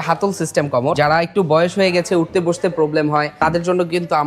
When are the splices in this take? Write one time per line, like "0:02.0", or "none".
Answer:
0:01.0
0:03.3